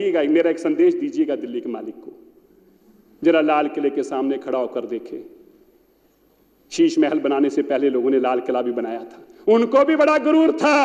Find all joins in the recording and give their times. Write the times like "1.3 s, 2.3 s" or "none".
none